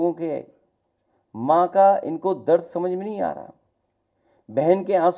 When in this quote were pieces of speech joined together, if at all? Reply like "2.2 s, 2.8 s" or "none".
none